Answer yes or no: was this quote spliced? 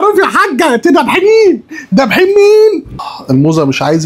yes